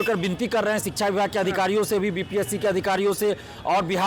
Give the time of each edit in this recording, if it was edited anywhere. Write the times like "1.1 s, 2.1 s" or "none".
none

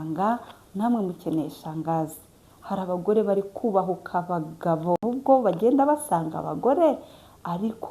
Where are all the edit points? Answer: 5.0 s

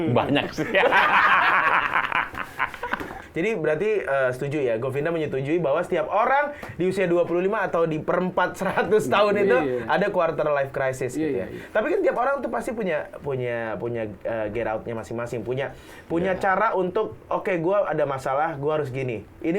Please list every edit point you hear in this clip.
3.2 s

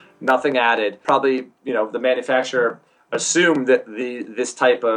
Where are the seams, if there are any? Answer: 1.0 s

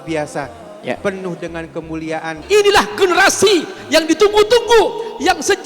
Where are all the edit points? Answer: 2.3 s

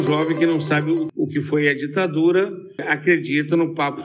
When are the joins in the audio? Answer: 1.1 s, 2.9 s

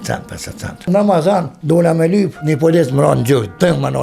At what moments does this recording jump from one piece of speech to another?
0.8 s, 1.5 s, 2.4 s

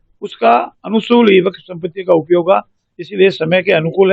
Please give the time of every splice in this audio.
none

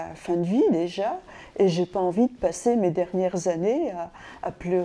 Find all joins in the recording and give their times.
none

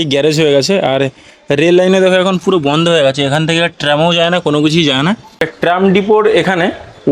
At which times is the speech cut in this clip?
5.5 s

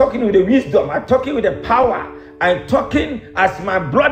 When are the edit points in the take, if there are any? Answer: none

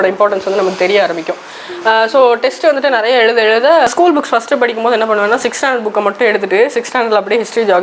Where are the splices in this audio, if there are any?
3.9 s

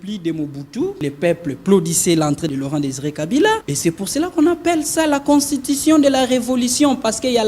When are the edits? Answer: 1.0 s, 2.5 s, 3.7 s

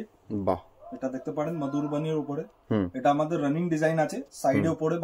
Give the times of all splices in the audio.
none

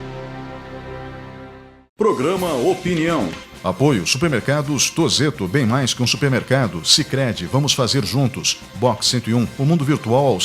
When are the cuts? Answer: 2.0 s

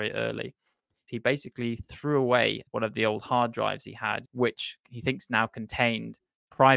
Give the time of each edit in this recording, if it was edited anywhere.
1.1 s, 2.6 s, 4.3 s

